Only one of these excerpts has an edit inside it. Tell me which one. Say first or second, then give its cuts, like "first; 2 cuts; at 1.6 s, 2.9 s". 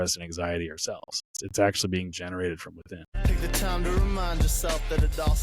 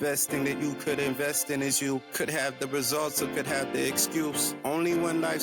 first; 2 cuts; at 1.4 s, 3.1 s